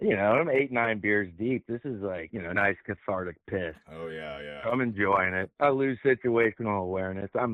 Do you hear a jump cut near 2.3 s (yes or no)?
yes